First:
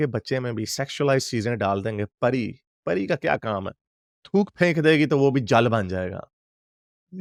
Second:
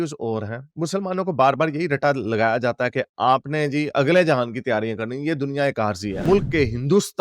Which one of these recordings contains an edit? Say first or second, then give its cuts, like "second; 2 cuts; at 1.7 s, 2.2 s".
second; 1 cut; at 6.2 s